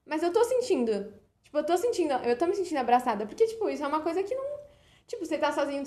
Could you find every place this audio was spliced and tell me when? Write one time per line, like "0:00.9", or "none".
none